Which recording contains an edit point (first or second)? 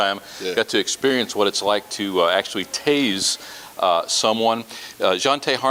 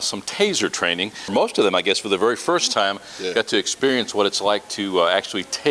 second